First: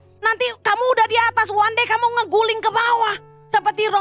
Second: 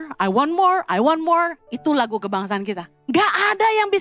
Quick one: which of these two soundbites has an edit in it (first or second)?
second